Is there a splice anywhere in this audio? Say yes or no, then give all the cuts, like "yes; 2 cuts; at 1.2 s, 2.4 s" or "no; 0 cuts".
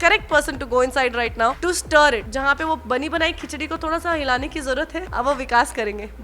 yes; 3 cuts; at 1.6 s, 2.3 s, 5.0 s